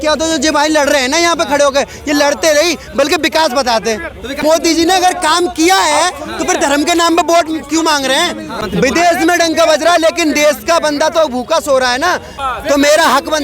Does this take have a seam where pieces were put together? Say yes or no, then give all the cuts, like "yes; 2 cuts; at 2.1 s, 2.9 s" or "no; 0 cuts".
yes; 3 cuts; at 4.3 s, 8.6 s, 12.4 s